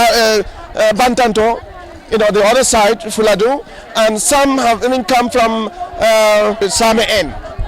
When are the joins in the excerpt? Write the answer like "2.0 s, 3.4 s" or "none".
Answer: 6.6 s